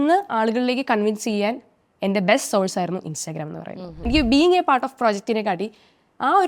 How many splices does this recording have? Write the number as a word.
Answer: one